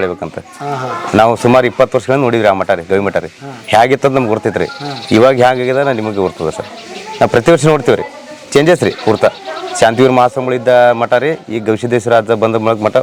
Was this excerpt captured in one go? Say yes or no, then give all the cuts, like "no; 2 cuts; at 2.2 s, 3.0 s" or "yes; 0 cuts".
yes; 0 cuts